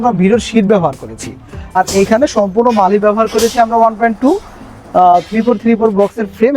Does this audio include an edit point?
yes; 1 cut; at 1.8 s

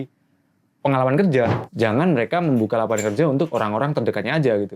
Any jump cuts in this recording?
yes; 1 cut; at 1.6 s

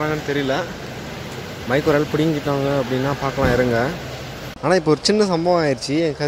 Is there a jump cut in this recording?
yes; 1 cut; at 4.4 s

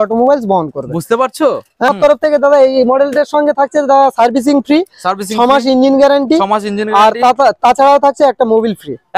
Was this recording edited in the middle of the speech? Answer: yes; 1 cut; at 1.9 s

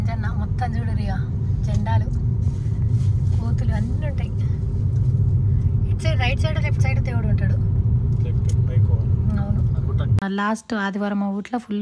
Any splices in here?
yes; 1 cut; at 10.2 s

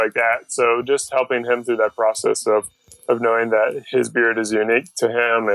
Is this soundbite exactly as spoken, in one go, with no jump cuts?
yes; 0 cuts

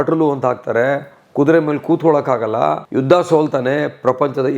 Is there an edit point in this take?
yes; 1 cut; at 2.8 s

